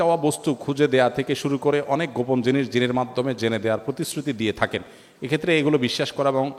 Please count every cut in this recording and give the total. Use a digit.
0